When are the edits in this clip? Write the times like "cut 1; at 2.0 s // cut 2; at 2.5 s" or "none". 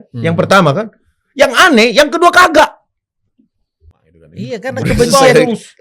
cut 1; at 4.5 s

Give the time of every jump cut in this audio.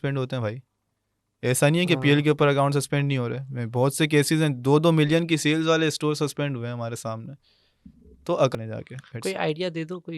cut 1; at 8.5 s

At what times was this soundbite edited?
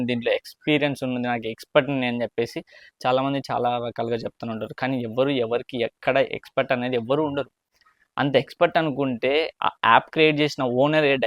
none

